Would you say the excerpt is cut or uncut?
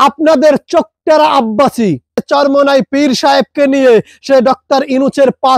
cut